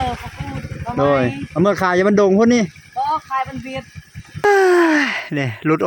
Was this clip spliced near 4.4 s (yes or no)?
yes